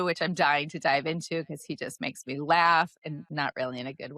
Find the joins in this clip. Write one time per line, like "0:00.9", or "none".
0:03.2

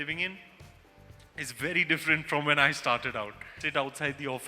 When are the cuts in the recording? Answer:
0:03.5

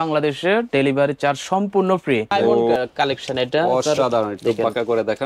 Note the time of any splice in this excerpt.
0:02.7

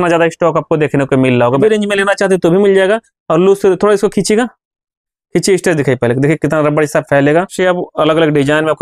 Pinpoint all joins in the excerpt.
0:01.6
0:07.5

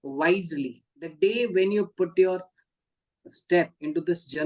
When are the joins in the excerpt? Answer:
0:01.1

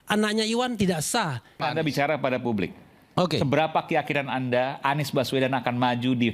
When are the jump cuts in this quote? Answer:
0:01.6

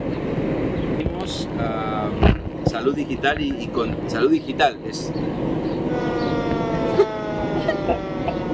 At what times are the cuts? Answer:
none

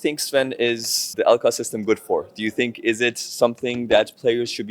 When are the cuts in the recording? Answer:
0:01.1

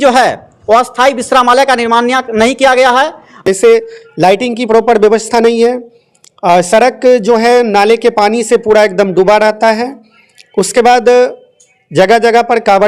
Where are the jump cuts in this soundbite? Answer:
0:03.4

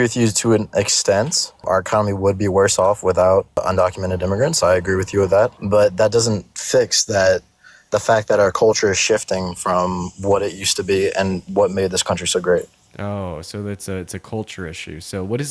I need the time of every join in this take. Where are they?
0:01.6
0:03.6
0:05.6

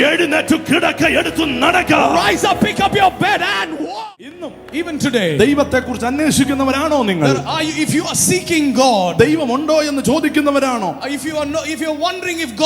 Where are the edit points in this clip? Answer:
0:04.4

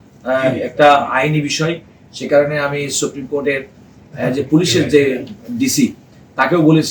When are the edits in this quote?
none

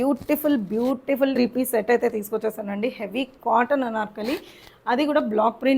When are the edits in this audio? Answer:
0:01.3

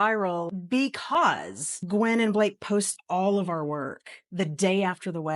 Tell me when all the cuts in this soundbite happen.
none

